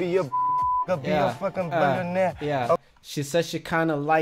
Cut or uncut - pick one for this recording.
uncut